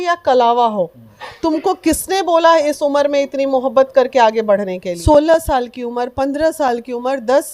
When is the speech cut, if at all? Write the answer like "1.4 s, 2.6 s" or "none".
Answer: 4.9 s